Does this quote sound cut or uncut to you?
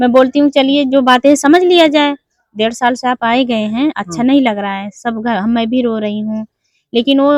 uncut